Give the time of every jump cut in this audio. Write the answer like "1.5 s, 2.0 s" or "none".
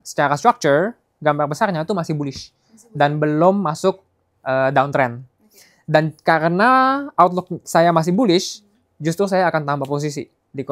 none